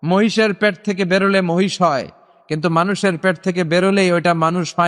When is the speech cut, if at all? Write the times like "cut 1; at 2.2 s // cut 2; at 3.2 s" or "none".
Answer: none